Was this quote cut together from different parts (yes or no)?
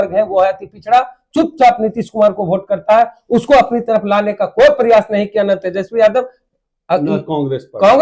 no